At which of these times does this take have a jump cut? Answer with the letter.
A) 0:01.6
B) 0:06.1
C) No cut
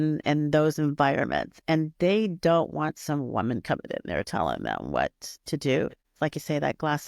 B